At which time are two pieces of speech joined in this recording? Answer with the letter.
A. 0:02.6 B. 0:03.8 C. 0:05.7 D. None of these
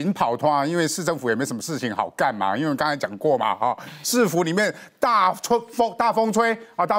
D